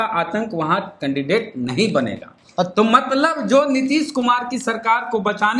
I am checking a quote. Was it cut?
no; 0 cuts

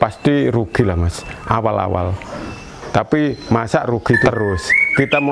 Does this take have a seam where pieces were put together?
yes; 1 cut; at 4.3 s

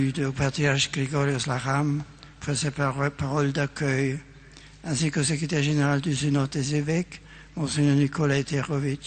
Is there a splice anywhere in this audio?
yes; 1 cut; at 1.4 s

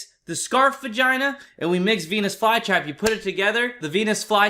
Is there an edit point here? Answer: no; 0 cuts

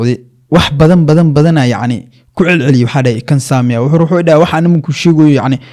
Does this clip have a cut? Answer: no; 0 cuts

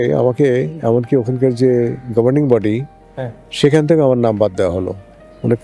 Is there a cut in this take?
no; 0 cuts

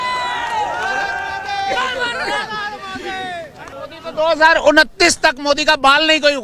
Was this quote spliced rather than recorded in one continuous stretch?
yes; 1 cut; at 3.7 s

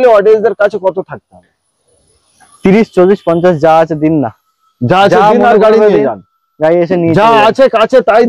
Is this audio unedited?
yes; 0 cuts

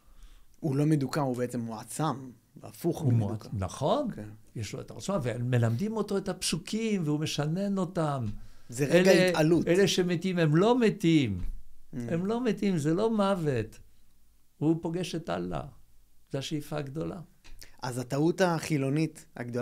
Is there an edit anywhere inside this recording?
no; 0 cuts

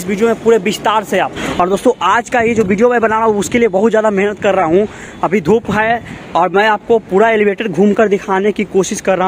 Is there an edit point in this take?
yes; 1 cut; at 1.4 s

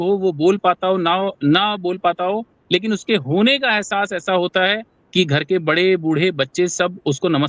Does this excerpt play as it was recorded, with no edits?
yes; 0 cuts

